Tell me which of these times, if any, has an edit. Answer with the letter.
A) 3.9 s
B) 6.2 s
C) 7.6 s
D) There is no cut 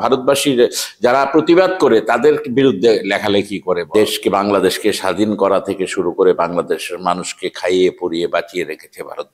A